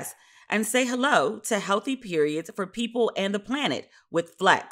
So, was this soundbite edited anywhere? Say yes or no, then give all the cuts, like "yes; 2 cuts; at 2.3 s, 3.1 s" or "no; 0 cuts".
no; 0 cuts